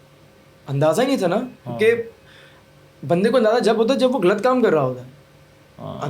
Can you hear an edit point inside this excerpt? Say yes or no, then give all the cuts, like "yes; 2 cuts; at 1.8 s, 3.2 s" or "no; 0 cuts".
no; 0 cuts